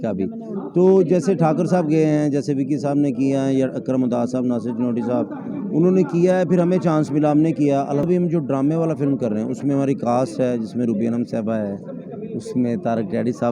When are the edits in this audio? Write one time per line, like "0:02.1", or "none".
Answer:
0:08.0